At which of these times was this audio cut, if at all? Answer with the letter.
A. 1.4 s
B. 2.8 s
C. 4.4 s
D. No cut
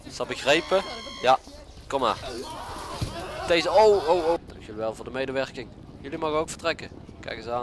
C